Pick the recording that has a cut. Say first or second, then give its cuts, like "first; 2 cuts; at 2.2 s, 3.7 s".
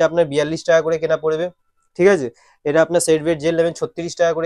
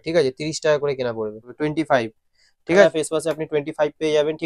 second; 2 cuts; at 1.5 s, 2.8 s